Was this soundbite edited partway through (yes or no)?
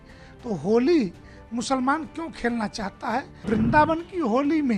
yes